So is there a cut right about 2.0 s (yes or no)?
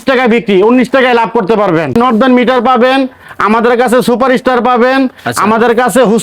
yes